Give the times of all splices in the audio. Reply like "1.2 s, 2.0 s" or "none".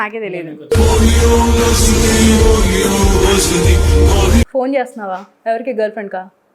4.5 s